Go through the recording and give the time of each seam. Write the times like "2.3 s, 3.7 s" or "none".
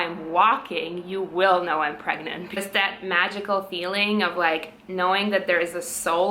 2.6 s